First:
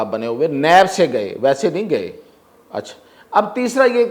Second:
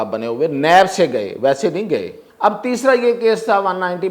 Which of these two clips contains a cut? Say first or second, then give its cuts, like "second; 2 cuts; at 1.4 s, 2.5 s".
second; 1 cut; at 2.2 s